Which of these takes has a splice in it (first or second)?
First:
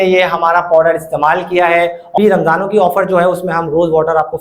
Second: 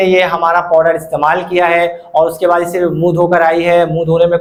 first